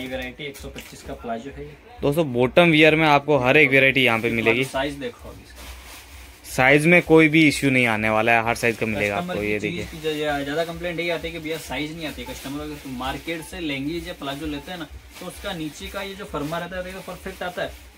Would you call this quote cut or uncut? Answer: uncut